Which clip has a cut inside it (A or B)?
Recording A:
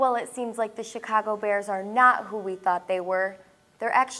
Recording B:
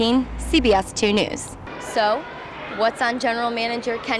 B